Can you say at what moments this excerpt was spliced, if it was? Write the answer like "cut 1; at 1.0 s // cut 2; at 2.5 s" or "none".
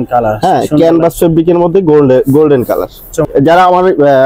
cut 1; at 3.3 s